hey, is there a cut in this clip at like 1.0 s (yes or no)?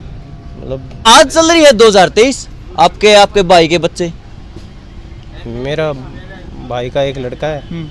yes